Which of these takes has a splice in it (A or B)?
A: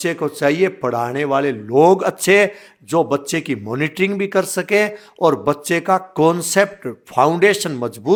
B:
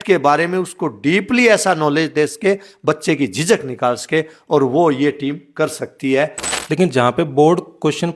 B